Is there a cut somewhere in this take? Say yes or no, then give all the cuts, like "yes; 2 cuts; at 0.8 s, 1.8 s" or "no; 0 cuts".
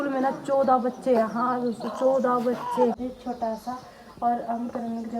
yes; 1 cut; at 3.0 s